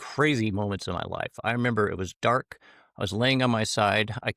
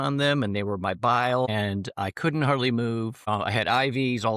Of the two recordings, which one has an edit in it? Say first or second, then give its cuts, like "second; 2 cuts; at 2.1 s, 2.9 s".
second; 2 cuts; at 1.5 s, 3.2 s